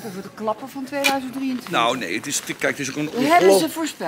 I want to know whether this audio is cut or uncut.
uncut